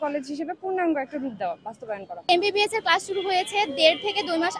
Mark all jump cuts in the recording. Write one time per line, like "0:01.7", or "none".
0:02.2